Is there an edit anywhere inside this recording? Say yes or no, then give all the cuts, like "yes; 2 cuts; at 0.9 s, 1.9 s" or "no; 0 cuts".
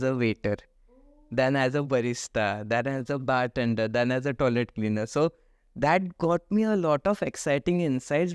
no; 0 cuts